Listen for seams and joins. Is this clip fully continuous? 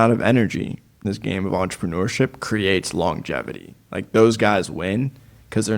no; 1 cut; at 1.0 s

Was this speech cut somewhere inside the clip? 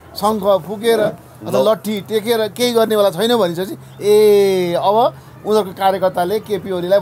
no; 0 cuts

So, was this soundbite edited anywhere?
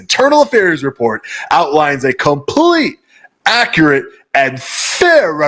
no; 0 cuts

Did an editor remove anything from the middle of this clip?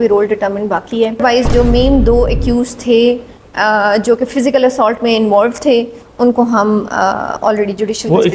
yes; 1 cut; at 1.2 s

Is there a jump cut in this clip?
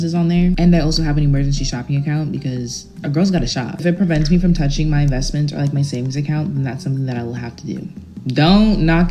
no; 0 cuts

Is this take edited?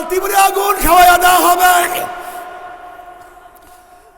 no; 0 cuts

